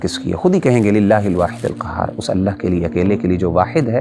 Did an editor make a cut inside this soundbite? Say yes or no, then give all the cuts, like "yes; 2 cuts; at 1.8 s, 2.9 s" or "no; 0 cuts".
no; 0 cuts